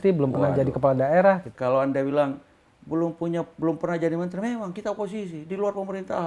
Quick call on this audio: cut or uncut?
cut